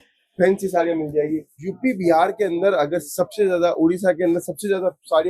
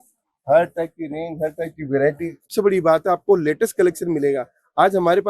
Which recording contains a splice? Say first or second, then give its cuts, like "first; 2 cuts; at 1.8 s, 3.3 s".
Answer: second; 1 cut; at 2.4 s